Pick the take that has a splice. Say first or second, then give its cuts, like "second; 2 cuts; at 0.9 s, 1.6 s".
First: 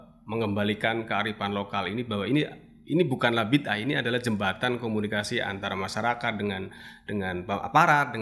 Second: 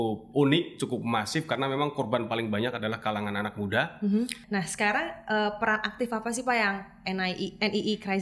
second; 1 cut; at 4.4 s